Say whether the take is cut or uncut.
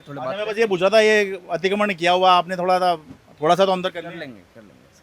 uncut